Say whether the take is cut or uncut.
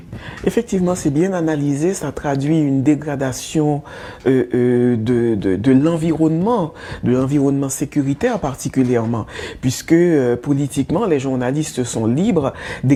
uncut